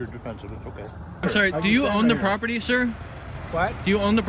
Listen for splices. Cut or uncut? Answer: cut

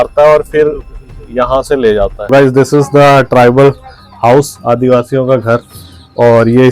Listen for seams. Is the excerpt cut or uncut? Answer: cut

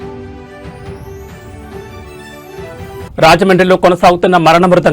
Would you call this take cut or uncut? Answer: cut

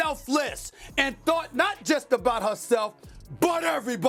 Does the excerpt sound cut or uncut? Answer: uncut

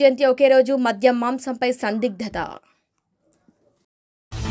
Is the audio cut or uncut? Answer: uncut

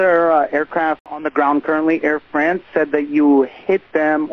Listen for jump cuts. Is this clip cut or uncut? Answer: cut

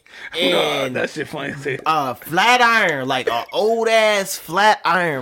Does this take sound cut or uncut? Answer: uncut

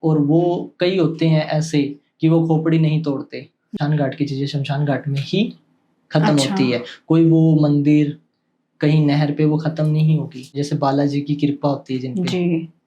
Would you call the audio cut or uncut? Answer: cut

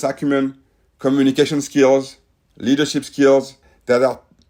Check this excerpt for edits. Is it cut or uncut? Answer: uncut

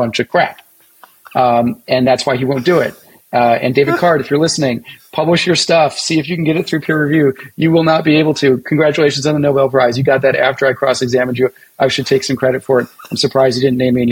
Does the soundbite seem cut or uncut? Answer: uncut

